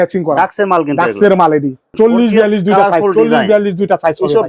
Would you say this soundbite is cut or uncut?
cut